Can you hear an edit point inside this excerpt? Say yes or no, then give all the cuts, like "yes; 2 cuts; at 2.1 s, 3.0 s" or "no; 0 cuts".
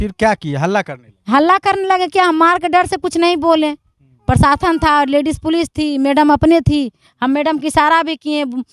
no; 0 cuts